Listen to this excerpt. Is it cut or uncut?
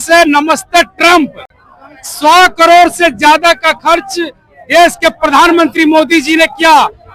uncut